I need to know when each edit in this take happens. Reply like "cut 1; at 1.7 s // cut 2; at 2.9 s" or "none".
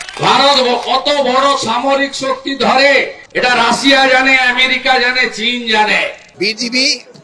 cut 1; at 3.2 s // cut 2; at 6.3 s